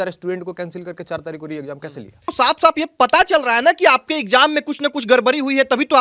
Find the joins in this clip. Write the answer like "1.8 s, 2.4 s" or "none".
2.3 s